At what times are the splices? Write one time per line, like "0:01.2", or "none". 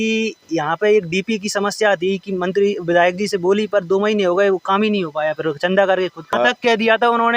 0:06.3